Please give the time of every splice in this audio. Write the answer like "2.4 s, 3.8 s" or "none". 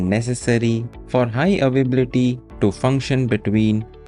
0.9 s, 2.5 s